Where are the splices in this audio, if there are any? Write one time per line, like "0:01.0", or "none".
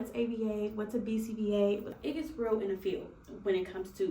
0:01.9